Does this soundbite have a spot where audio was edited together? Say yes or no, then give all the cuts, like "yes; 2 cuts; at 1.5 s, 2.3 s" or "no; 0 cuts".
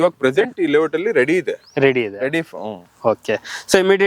no; 0 cuts